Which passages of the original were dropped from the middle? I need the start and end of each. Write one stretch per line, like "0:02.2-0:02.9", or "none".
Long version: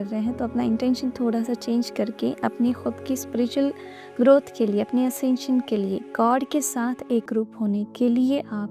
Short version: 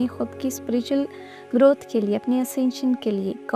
none